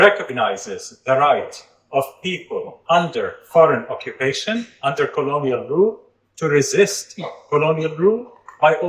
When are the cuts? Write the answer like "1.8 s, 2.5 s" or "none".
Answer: none